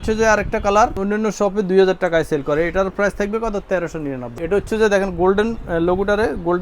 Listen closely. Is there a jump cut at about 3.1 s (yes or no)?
no